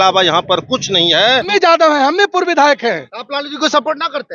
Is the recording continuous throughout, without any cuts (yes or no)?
no